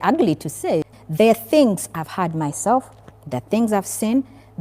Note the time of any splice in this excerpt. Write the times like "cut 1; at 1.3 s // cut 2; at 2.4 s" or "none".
cut 1; at 0.9 s